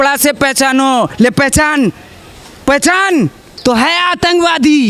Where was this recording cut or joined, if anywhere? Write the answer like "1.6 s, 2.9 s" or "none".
3.5 s